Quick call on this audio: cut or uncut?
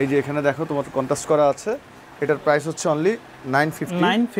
uncut